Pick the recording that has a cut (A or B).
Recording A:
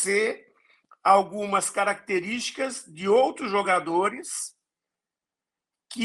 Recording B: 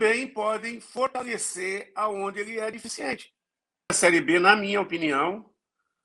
B